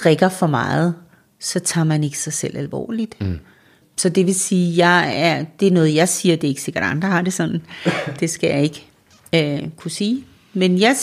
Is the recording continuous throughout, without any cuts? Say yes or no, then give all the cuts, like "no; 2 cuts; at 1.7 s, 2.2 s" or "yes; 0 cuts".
no; 1 cut; at 3.8 s